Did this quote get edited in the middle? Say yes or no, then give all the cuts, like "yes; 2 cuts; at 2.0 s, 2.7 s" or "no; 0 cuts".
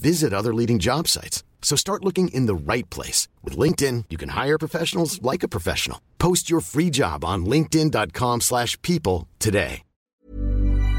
yes; 1 cut; at 10.1 s